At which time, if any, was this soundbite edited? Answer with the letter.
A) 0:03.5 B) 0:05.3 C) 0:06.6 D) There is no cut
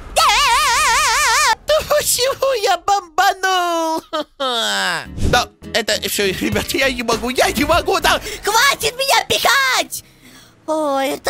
B